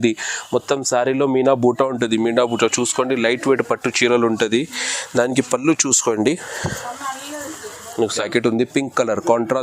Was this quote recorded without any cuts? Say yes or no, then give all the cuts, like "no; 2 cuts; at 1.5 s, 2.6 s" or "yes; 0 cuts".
no; 1 cut; at 8.3 s